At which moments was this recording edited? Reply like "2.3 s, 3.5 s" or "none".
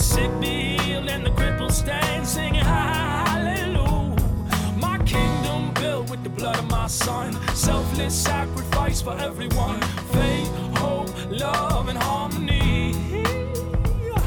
none